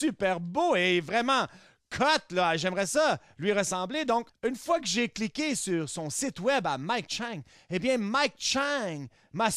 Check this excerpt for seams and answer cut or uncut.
cut